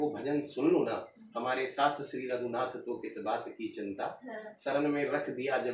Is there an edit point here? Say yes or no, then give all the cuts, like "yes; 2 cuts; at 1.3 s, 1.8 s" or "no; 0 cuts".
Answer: no; 0 cuts